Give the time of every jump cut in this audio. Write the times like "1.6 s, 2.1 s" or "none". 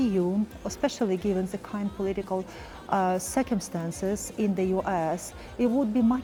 none